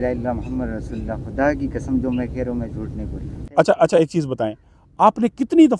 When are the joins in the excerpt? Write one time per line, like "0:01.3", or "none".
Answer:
0:03.5